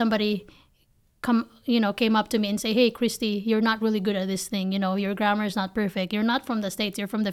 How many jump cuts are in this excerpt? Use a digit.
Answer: 0